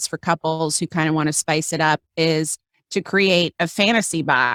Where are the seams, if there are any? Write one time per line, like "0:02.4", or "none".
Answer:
none

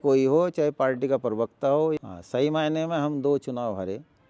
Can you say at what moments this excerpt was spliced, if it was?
0:02.0

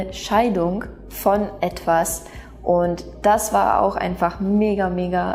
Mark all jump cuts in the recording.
none

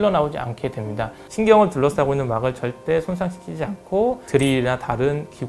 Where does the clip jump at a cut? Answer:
0:01.2

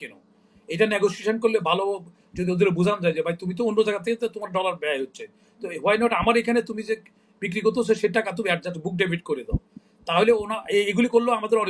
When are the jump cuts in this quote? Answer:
none

